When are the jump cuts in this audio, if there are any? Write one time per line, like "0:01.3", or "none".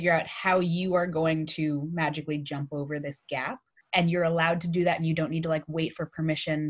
0:03.8